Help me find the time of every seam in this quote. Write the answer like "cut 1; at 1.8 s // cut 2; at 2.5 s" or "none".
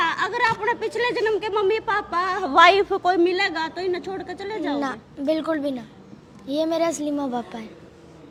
none